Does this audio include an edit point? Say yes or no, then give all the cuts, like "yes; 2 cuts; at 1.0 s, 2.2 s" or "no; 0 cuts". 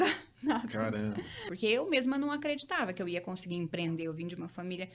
yes; 1 cut; at 1.4 s